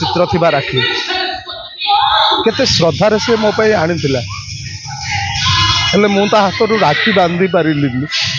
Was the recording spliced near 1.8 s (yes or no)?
no